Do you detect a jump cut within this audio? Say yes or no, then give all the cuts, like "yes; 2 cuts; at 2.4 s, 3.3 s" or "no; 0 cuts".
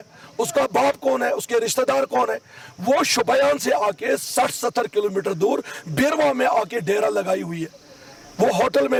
no; 0 cuts